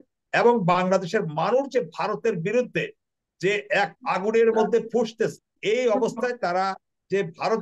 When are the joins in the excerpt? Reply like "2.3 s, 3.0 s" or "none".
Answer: 3.9 s, 5.5 s